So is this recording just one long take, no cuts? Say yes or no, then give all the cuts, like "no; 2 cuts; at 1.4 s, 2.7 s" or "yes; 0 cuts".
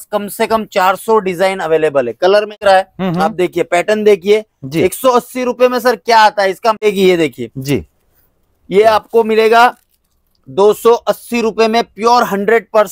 no; 2 cuts; at 2.5 s, 6.9 s